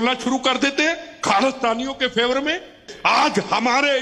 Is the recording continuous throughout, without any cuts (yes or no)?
no